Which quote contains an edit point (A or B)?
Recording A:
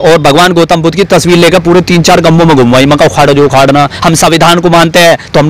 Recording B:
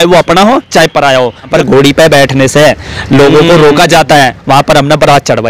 B